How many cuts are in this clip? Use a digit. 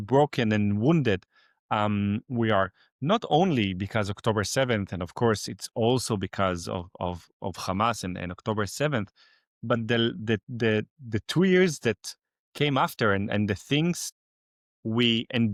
0